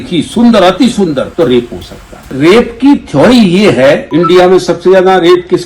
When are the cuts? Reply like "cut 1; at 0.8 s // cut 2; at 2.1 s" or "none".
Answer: cut 1; at 1.3 s // cut 2; at 2.2 s // cut 3; at 4.1 s